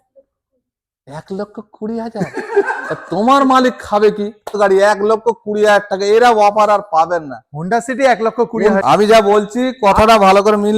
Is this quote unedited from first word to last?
no; 2 cuts; at 4.6 s, 8.8 s

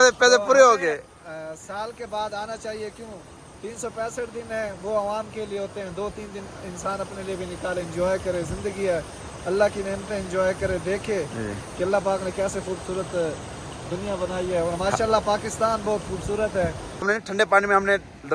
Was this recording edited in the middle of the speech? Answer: yes; 1 cut; at 17.1 s

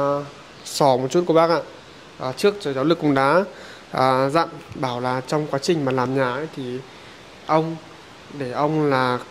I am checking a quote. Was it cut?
no; 0 cuts

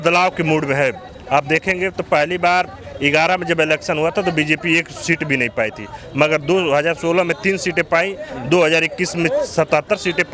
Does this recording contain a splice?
no; 0 cuts

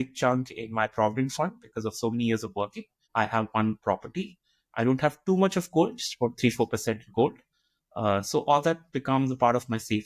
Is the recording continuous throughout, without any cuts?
no; 1 cut; at 3.0 s

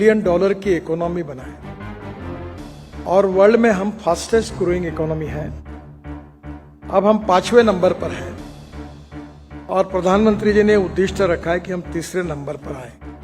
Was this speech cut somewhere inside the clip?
yes; 2 cuts; at 1.5 s, 3.0 s

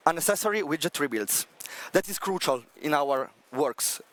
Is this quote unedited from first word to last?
yes; 0 cuts

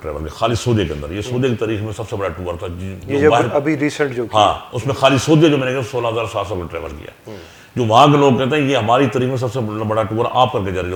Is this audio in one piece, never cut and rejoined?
yes; 0 cuts

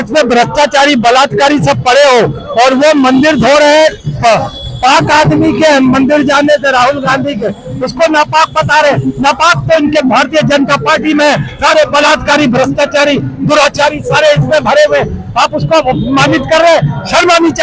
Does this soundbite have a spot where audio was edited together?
no; 0 cuts

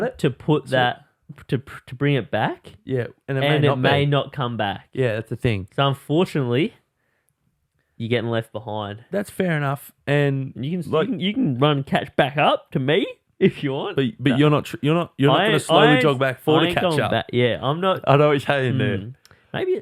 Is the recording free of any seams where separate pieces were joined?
yes; 0 cuts

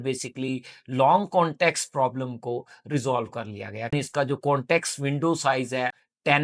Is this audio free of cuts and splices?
no; 1 cut; at 3.9 s

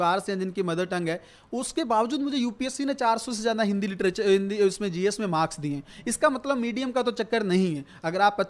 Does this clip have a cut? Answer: no; 0 cuts

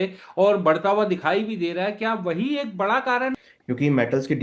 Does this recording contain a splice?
yes; 1 cut; at 3.4 s

